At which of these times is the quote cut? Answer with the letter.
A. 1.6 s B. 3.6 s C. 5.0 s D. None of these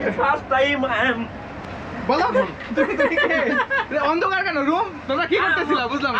D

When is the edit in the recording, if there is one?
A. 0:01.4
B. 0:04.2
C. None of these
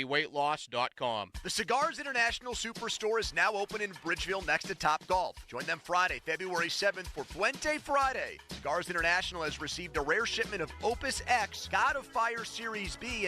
A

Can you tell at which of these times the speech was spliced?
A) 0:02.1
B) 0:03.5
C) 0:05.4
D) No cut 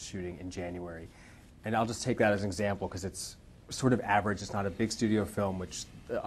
A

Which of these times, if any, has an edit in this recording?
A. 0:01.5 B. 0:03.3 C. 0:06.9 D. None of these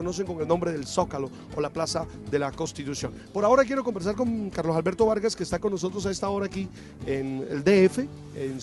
C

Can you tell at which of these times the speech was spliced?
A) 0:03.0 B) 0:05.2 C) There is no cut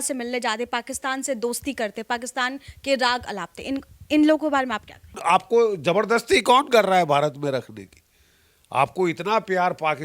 B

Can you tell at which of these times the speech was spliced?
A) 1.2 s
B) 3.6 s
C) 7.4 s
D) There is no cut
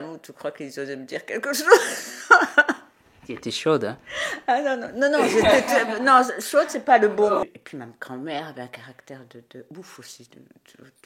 C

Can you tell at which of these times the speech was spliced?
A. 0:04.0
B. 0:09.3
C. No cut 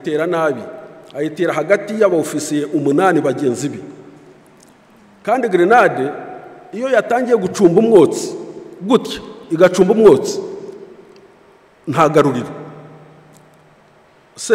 C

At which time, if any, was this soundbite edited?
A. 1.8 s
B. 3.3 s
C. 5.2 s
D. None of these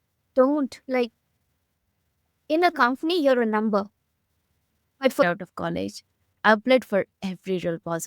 C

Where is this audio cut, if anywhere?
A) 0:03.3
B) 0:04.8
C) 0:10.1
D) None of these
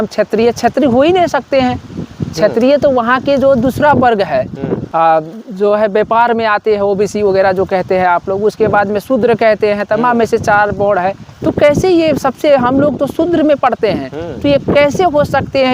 B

